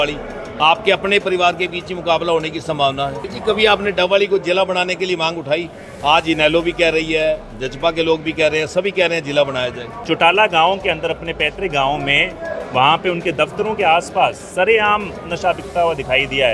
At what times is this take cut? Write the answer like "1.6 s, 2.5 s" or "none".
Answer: 3.3 s, 9.9 s